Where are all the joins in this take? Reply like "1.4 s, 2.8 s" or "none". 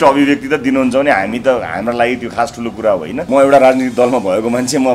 3.3 s